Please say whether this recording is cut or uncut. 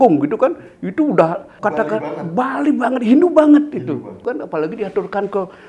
cut